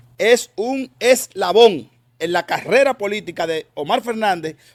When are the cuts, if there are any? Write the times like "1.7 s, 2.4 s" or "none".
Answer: none